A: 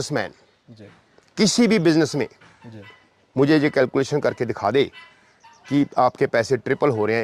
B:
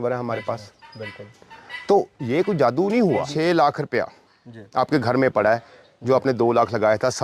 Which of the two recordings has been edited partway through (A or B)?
B